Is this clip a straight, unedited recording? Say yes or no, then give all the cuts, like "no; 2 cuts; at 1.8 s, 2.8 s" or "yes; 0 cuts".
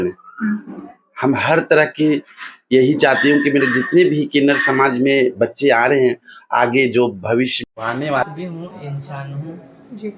no; 1 cut; at 8.2 s